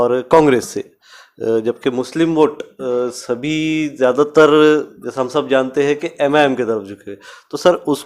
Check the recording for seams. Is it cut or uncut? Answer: uncut